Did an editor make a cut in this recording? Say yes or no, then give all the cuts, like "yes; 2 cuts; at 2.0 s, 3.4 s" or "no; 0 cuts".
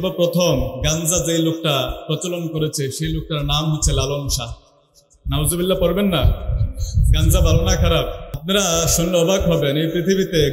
yes; 1 cut; at 8.3 s